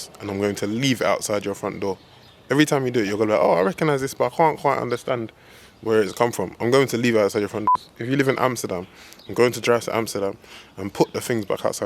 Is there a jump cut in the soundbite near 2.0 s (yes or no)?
no